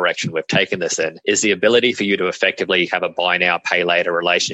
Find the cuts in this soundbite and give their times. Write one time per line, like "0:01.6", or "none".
0:01.2